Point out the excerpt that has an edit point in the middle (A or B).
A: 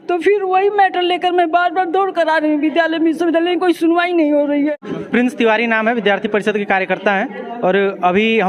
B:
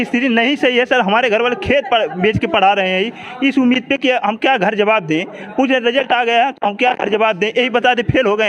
A